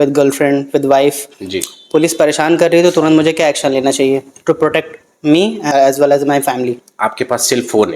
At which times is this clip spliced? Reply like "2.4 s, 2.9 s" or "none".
5.7 s, 6.8 s